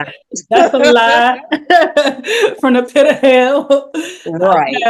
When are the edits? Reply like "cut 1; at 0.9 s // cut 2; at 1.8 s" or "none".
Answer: none